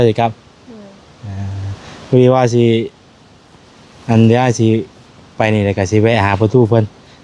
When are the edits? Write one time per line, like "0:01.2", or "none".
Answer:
none